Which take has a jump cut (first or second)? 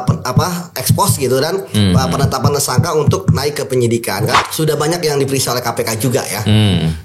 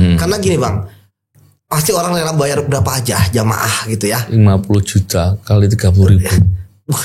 first